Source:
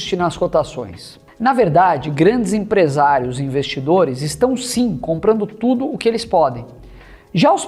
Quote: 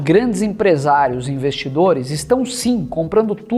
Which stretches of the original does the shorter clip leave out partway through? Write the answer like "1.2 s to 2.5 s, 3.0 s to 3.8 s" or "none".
none